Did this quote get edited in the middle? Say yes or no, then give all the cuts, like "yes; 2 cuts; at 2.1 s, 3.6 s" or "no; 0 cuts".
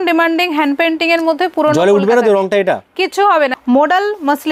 yes; 1 cut; at 3.6 s